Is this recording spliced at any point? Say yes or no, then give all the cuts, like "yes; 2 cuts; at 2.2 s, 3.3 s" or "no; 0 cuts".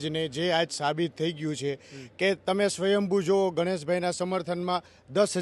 no; 0 cuts